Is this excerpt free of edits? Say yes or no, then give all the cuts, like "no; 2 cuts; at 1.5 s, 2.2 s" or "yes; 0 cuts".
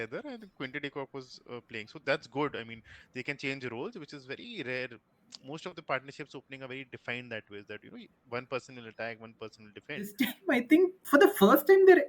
no; 1 cut; at 10.1 s